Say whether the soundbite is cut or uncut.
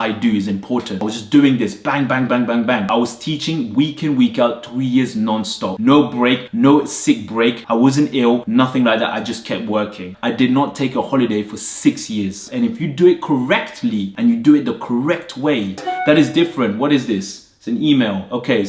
cut